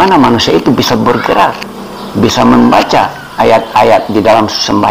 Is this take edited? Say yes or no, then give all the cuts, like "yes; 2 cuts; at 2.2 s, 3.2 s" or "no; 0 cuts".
no; 0 cuts